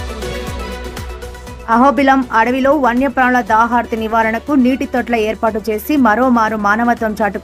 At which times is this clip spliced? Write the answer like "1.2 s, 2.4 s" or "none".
none